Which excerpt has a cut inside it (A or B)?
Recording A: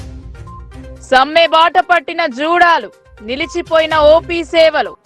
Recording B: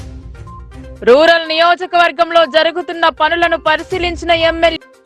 A